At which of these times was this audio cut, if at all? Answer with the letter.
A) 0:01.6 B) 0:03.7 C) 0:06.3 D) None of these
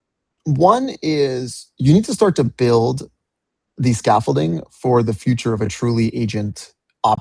D